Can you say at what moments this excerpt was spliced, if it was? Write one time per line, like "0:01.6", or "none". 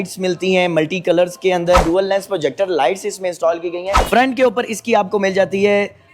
0:01.8
0:04.0